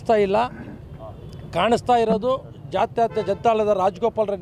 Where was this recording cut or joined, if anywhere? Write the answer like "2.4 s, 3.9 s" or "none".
none